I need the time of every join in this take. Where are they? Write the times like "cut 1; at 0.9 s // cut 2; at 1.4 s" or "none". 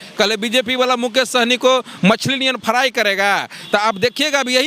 none